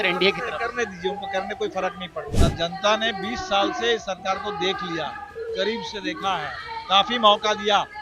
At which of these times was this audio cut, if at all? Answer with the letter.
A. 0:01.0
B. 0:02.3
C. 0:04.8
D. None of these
B